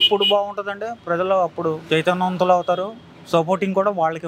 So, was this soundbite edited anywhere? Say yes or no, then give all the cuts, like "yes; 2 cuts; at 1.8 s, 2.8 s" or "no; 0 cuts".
no; 0 cuts